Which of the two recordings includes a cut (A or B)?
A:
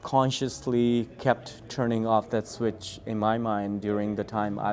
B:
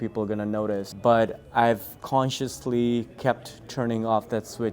B